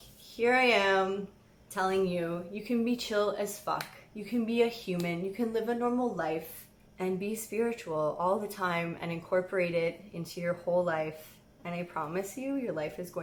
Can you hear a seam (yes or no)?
no